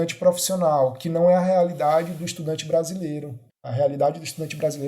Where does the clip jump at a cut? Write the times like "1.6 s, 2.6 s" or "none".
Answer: 3.7 s